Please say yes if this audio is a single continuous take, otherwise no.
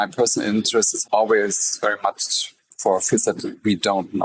no